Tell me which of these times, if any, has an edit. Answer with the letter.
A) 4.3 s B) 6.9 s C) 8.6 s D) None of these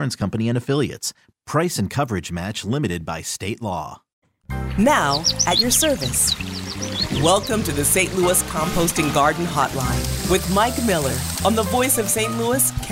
A